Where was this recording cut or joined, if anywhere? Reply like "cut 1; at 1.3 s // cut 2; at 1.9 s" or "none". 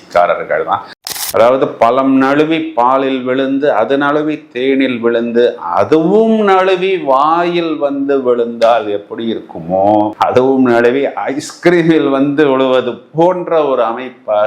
cut 1; at 1.0 s